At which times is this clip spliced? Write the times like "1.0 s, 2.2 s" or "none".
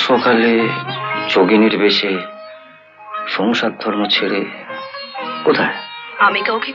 none